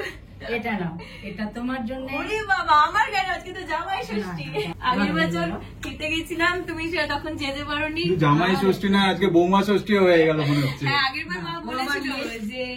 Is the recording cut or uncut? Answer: cut